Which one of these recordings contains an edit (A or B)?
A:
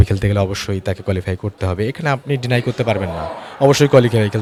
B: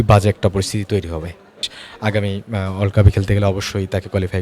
B